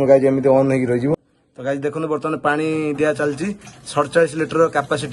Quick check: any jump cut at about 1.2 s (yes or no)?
yes